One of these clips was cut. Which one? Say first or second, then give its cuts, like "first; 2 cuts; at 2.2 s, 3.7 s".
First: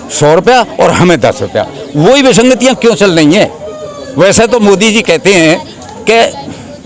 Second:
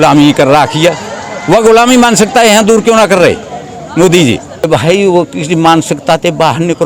second; 1 cut; at 4.7 s